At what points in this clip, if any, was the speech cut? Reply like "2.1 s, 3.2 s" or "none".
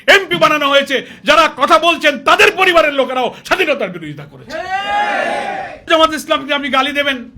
5.9 s